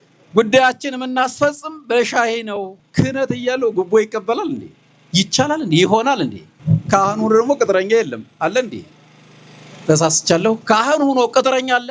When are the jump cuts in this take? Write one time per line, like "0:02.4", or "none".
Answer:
0:02.8
0:06.5